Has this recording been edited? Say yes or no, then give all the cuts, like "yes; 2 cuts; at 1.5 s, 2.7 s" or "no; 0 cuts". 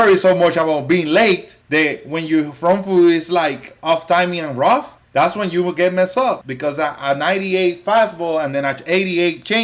yes; 3 cuts; at 1.5 s, 5.0 s, 6.5 s